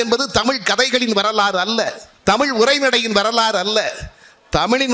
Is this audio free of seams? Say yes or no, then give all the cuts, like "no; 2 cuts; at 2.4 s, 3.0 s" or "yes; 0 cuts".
no; 1 cut; at 2.0 s